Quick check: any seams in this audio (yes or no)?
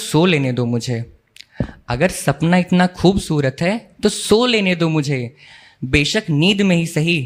no